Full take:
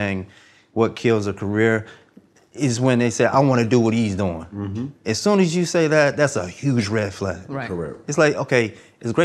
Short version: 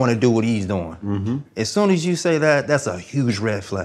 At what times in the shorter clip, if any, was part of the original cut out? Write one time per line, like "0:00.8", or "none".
none